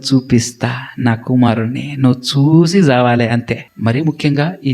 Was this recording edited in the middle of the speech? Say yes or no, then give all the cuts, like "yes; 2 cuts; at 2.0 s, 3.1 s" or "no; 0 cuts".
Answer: yes; 1 cut; at 3.7 s